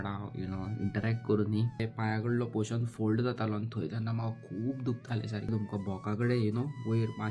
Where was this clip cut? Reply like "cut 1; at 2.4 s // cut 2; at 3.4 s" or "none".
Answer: cut 1; at 1.9 s // cut 2; at 5.5 s